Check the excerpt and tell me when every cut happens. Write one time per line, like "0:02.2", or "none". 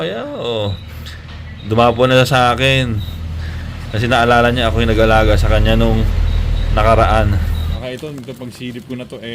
0:07.8